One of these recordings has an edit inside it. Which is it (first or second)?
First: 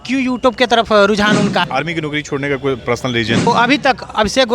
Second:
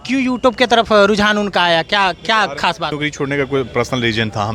first